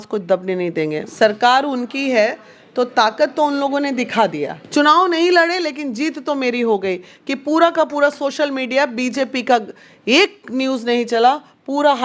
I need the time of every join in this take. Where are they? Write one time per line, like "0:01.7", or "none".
0:01.1
0:04.6